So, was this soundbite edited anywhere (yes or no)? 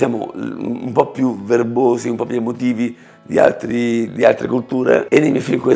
no